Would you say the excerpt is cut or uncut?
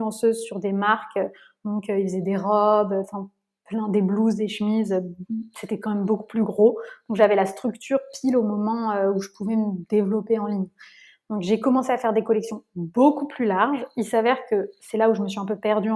uncut